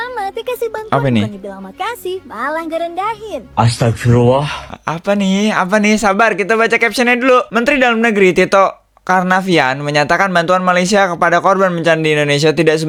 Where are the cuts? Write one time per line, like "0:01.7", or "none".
none